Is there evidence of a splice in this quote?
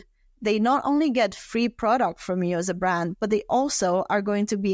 no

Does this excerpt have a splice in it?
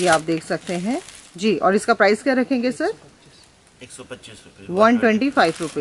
no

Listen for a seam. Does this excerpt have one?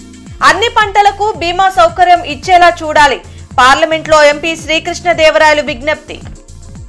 no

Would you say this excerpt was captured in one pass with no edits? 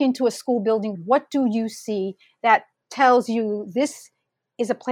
no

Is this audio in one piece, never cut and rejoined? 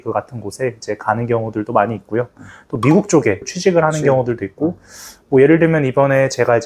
no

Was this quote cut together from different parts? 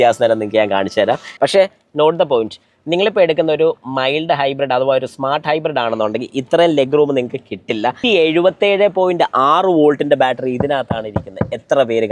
yes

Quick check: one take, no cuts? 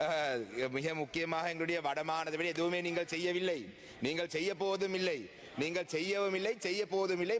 yes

